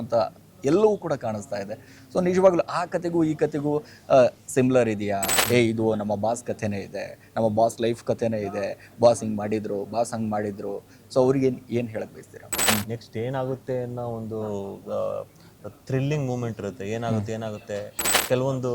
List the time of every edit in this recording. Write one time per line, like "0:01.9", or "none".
0:05.3
0:12.6